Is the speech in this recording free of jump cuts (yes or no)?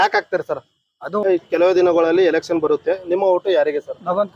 no